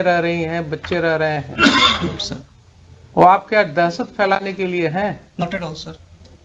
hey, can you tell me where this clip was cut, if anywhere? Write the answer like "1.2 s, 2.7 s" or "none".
none